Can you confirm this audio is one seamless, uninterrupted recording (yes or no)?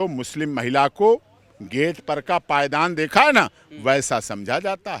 yes